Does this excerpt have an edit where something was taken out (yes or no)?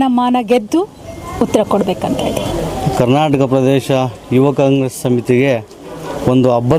no